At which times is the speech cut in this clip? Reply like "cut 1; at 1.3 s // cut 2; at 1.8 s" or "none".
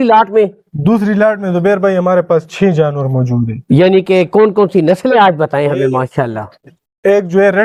none